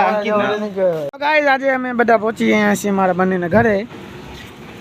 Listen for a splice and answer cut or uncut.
cut